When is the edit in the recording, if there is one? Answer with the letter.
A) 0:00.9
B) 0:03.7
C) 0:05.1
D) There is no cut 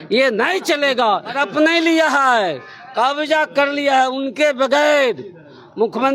A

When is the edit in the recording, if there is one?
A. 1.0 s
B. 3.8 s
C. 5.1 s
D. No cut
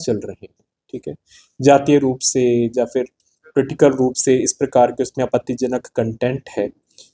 D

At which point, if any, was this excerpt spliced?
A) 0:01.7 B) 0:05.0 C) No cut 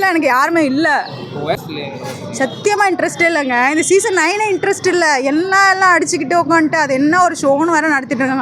C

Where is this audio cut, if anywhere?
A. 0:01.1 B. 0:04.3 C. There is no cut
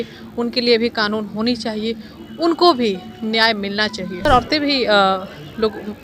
B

